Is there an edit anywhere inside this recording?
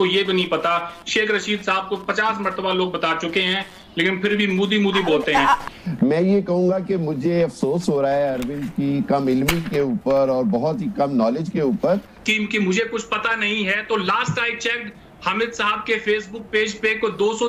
yes; 2 cuts; at 5.7 s, 12.1 s

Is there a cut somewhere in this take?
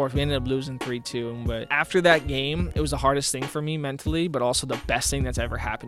yes; 2 cuts; at 1.8 s, 2.7 s

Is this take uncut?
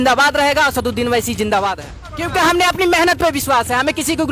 no; 1 cut; at 2.2 s

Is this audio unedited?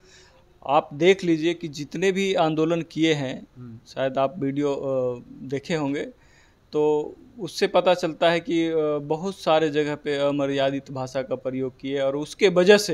yes; 0 cuts

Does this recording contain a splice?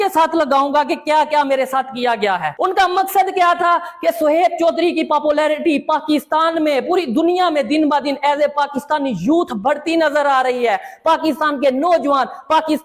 yes; 1 cut; at 2.5 s

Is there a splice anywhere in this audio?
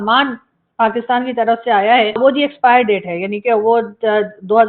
yes; 1 cut; at 2.2 s

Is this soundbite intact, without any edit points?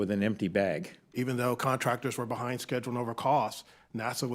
no; 1 cut; at 1.0 s

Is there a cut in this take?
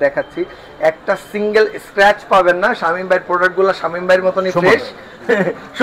no; 0 cuts

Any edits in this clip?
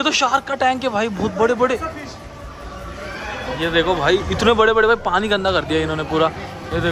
no; 0 cuts

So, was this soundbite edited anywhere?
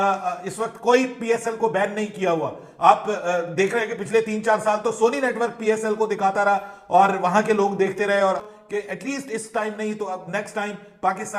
yes; 1 cut; at 8.5 s

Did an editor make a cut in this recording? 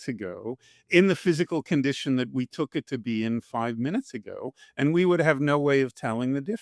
no; 0 cuts

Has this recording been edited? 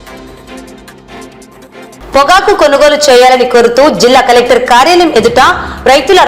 yes; 1 cut; at 1.3 s

